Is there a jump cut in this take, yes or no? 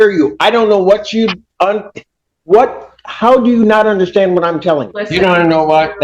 yes